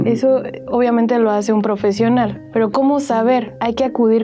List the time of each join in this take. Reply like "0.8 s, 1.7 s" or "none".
2.4 s